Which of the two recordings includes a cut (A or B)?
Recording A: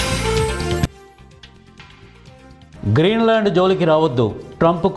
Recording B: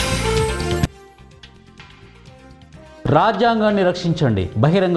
A